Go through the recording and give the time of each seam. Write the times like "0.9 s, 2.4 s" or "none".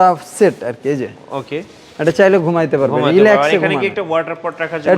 none